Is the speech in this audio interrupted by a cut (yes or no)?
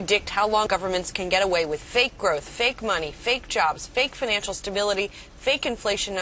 no